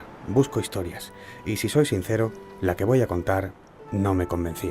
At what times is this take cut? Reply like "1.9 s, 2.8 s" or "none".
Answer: 2.6 s